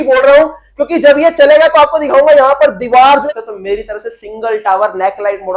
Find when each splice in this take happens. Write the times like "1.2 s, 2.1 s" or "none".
3.2 s